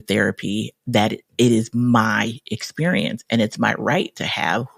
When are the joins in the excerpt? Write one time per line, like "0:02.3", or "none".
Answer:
none